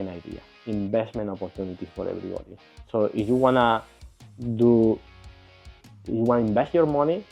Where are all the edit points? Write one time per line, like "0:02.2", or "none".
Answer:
none